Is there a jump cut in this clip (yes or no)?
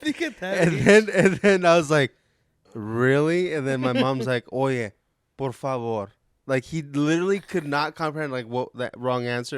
yes